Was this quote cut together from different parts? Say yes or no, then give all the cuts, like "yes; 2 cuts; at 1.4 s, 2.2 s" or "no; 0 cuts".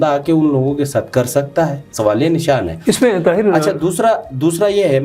no; 0 cuts